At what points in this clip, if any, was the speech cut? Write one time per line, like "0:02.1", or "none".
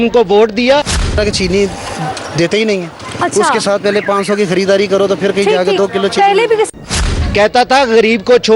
0:01.1
0:06.7